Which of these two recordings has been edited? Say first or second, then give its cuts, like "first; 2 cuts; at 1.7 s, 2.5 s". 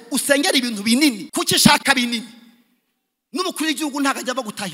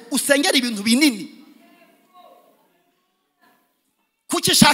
first; 1 cut; at 1.2 s